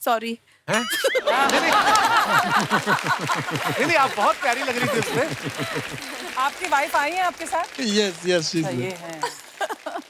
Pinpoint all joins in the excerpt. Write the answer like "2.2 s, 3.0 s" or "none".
6.2 s